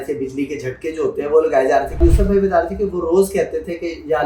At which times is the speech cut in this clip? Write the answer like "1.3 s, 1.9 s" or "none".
2.0 s